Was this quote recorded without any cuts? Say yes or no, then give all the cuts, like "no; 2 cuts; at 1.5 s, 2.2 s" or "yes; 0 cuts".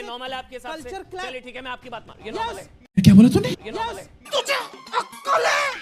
yes; 0 cuts